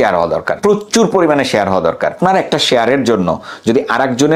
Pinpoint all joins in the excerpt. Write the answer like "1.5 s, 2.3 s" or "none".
2.1 s